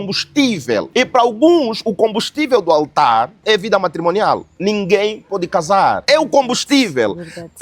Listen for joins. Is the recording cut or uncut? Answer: cut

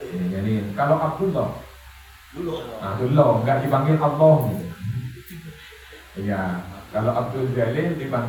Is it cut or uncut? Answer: uncut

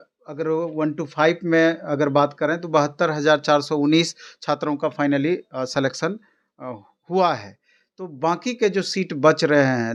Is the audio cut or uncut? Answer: uncut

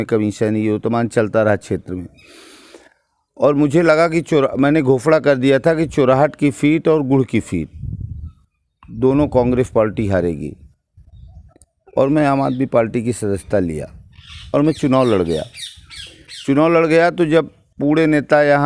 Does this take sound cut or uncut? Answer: uncut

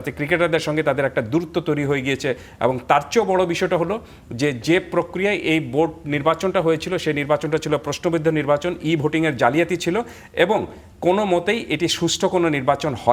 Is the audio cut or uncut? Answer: uncut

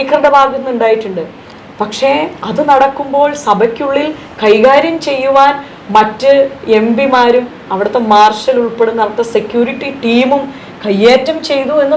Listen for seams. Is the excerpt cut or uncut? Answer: uncut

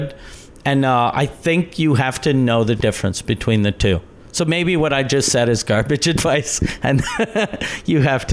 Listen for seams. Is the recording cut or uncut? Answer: uncut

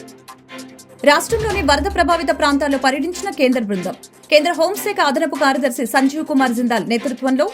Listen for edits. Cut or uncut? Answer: cut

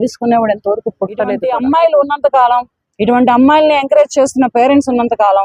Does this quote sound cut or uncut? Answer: cut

